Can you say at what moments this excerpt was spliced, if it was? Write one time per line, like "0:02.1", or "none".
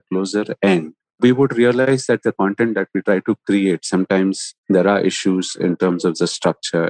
0:01.2
0:01.9
0:04.5